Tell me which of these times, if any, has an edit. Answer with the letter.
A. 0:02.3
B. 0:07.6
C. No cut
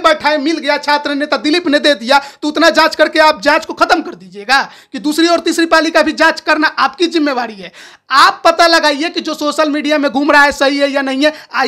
C